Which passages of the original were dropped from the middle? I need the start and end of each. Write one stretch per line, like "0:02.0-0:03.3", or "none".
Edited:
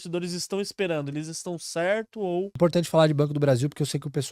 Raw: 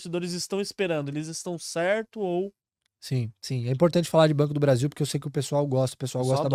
0:02.5-0:03.7